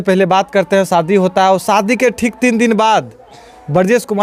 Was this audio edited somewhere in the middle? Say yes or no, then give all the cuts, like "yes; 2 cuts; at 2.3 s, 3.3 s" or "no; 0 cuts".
no; 0 cuts